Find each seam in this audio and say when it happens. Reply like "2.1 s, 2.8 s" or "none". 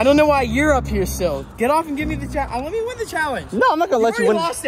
none